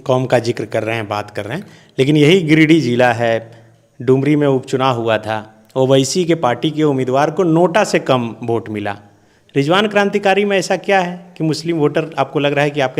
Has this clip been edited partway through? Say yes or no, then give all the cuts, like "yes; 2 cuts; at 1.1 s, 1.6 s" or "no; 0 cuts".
no; 0 cuts